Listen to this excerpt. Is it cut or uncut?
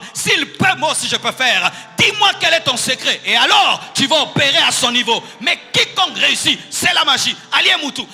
uncut